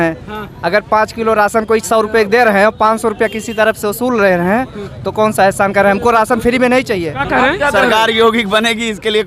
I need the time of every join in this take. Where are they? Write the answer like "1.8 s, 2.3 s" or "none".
7.1 s